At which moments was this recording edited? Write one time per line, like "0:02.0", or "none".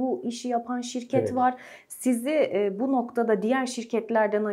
none